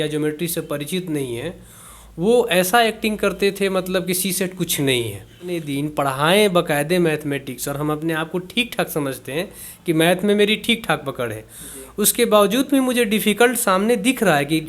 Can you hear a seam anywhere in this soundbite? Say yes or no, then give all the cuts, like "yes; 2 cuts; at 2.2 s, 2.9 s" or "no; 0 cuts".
yes; 1 cut; at 5.7 s